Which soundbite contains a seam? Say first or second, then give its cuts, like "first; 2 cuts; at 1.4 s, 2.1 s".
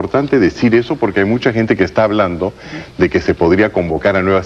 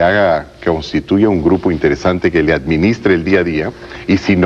second; 1 cut; at 1.5 s